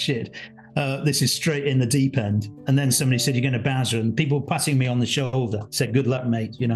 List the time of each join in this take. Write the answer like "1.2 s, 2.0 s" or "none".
none